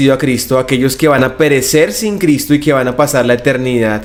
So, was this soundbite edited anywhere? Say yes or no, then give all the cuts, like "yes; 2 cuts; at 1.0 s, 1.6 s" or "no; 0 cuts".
no; 0 cuts